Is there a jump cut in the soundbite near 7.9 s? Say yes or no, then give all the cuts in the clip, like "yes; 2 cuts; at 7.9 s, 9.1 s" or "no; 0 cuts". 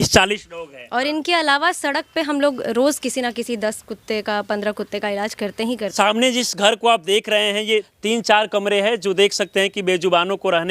yes; 2 cuts; at 5.9 s, 7.9 s